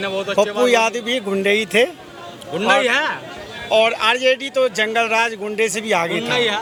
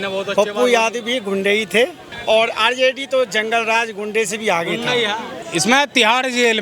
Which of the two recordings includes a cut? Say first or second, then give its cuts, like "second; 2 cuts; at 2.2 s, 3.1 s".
second; 2 cuts; at 2.1 s, 5.4 s